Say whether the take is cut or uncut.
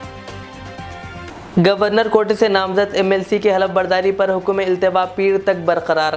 uncut